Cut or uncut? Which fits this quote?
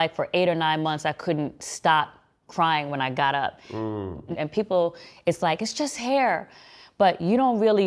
cut